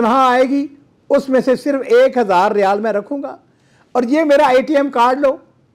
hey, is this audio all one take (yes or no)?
yes